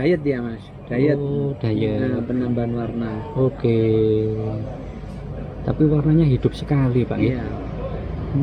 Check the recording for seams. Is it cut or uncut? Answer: uncut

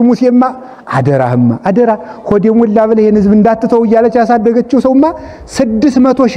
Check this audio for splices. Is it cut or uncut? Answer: uncut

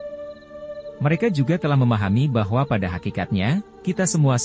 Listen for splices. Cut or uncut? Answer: cut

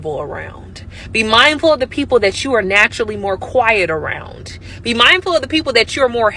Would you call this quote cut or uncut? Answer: uncut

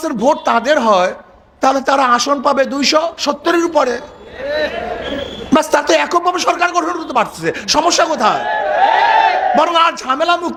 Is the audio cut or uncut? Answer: uncut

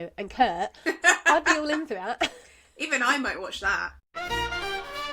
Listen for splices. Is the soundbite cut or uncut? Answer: cut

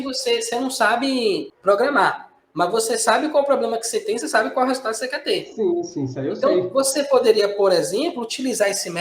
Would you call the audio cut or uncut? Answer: cut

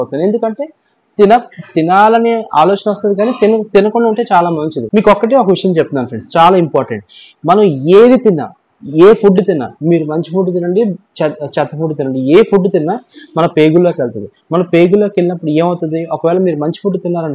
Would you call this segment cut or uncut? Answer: cut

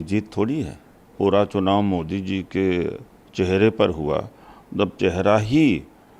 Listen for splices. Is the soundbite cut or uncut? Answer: cut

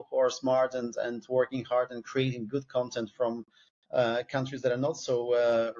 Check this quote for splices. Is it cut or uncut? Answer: uncut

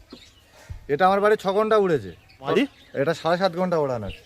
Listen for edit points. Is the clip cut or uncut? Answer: cut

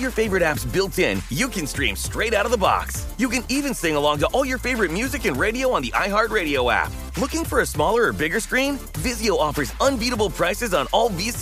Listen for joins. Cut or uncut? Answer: uncut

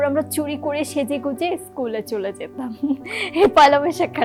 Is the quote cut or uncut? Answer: uncut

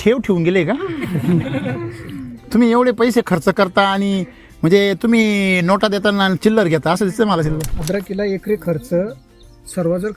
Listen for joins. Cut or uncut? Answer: cut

